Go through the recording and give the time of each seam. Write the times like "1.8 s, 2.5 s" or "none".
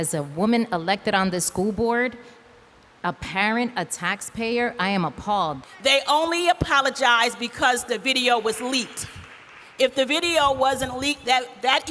5.6 s